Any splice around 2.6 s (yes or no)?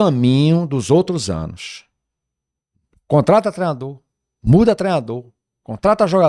no